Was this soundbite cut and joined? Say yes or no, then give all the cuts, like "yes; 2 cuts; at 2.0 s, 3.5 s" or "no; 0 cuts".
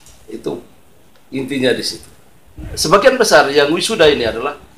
yes; 1 cut; at 2.7 s